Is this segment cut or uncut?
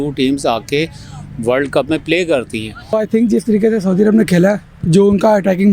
cut